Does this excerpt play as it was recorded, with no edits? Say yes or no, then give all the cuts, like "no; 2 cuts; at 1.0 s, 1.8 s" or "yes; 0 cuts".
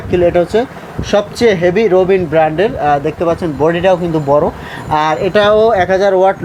yes; 0 cuts